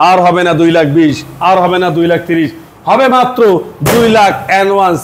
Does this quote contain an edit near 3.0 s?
no; 0 cuts

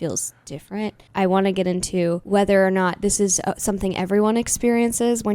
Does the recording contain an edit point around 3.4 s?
no; 2 cuts; at 1.1 s, 2.2 s

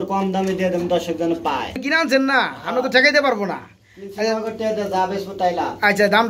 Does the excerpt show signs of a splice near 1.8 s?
yes; 1 cut; at 1.8 s

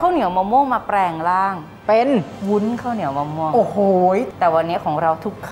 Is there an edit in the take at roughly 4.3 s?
yes; 1 cut; at 4.3 s

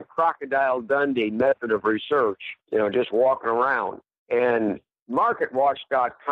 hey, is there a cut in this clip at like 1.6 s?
yes; 1 cut; at 1.6 s

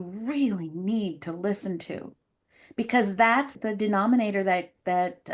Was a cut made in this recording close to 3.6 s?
yes; 1 cut; at 3.6 s

